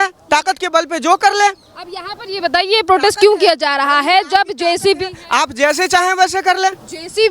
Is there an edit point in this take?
no; 0 cuts

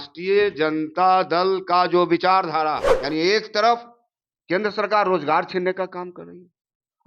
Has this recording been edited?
yes; 1 cut; at 2.9 s

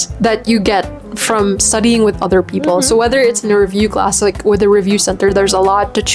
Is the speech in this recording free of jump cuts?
yes; 0 cuts

